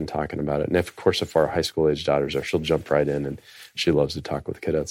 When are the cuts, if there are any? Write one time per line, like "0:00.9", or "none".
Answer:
none